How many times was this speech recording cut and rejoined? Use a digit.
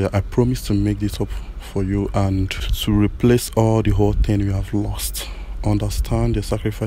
1